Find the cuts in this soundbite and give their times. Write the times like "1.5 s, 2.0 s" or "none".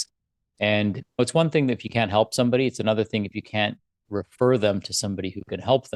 1.2 s